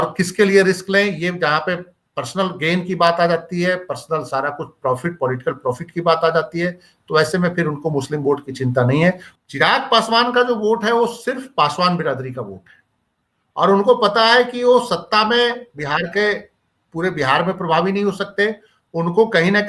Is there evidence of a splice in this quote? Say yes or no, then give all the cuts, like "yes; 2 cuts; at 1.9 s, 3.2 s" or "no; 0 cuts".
yes; 1 cut; at 9.3 s